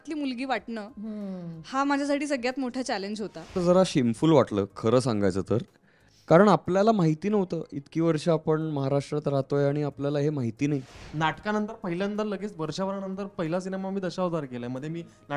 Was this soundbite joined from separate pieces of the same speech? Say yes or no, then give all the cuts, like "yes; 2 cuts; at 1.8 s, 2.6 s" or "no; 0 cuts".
yes; 2 cuts; at 3.6 s, 11.0 s